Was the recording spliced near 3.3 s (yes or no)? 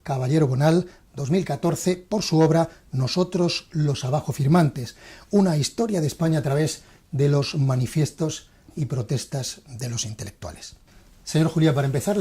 no